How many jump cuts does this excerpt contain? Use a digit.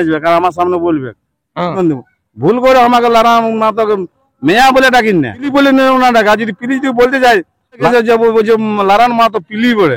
3